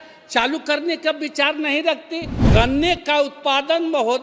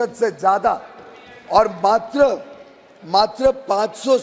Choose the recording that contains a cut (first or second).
first